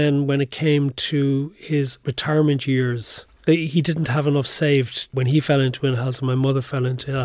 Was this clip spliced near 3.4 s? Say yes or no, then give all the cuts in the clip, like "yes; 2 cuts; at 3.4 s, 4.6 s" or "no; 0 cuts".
yes; 3 cuts; at 2.1 s, 3.4 s, 5.1 s